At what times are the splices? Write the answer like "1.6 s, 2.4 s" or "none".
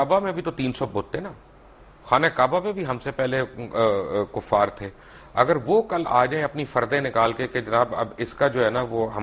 none